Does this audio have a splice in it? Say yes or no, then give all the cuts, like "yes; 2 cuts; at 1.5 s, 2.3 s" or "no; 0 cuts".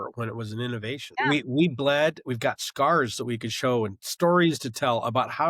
yes; 1 cut; at 1.1 s